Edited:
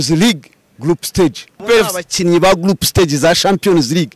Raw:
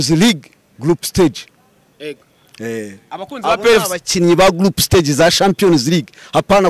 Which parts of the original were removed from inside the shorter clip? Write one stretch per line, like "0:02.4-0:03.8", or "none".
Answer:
0:01.6-0:03.6